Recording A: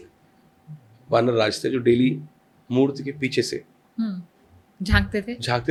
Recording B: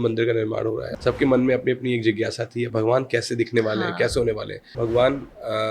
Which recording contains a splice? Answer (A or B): B